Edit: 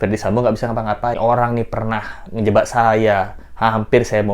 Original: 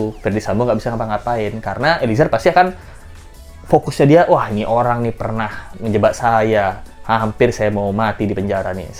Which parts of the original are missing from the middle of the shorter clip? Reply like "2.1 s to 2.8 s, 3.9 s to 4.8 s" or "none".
1.4 s to 4.6 s